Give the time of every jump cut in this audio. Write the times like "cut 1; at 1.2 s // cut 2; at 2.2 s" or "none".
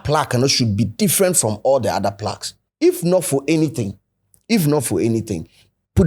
cut 1; at 2.6 s